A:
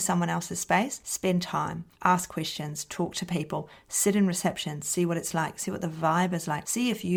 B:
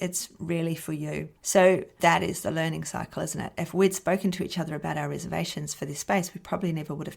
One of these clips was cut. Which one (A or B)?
B